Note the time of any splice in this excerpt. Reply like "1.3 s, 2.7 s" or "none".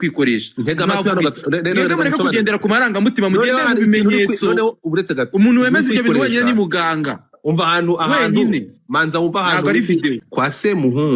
10.2 s

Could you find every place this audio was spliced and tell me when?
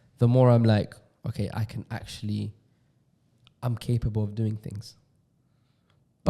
none

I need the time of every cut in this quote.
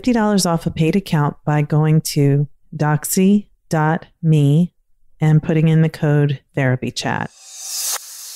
7.4 s

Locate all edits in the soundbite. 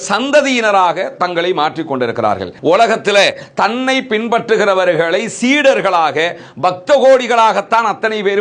2.5 s

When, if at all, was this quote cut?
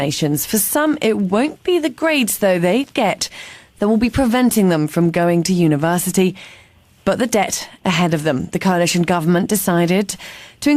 none

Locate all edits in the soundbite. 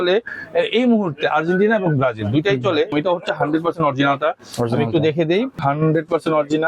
2.9 s, 5.6 s

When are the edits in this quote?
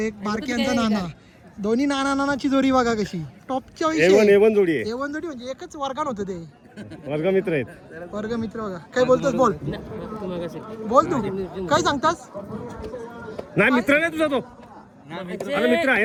none

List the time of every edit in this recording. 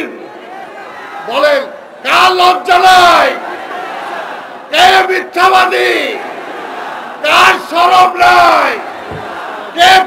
none

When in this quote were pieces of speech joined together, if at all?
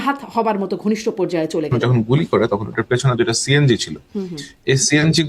1.7 s

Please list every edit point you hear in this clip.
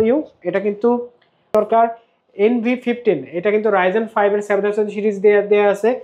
1.5 s

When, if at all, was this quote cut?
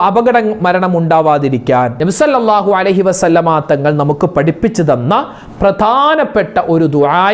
1.9 s

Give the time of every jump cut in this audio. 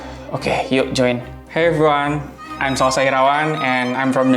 1.4 s

